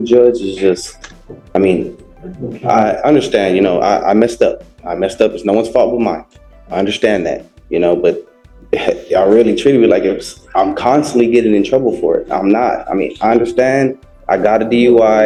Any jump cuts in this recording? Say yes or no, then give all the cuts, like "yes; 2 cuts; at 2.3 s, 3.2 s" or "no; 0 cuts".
no; 0 cuts